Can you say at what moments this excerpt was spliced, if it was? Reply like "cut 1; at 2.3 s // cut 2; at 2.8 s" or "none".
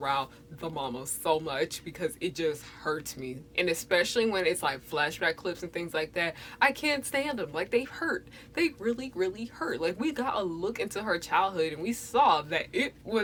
none